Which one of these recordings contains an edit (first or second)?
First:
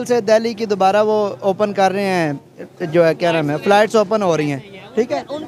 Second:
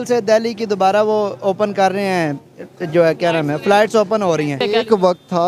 second